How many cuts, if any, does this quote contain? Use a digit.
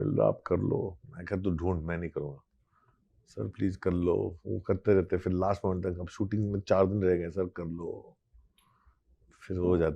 0